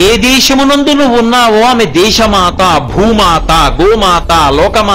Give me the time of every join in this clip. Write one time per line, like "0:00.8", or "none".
none